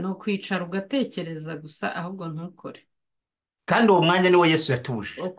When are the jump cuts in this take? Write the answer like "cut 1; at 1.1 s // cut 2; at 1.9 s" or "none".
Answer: none